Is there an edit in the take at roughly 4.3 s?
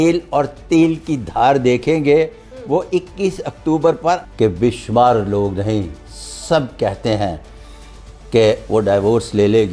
yes; 1 cut; at 4.3 s

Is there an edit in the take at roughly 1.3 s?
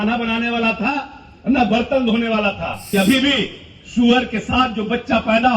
no; 1 cut; at 2.9 s

